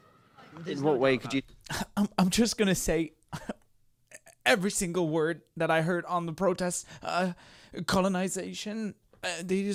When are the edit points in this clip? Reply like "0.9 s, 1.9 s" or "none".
none